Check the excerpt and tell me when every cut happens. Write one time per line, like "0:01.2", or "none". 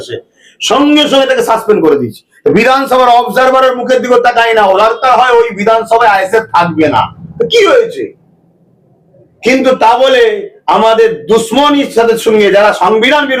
none